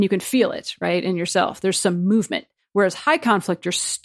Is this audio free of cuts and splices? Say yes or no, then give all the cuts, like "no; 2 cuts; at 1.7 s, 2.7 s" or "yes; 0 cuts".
yes; 0 cuts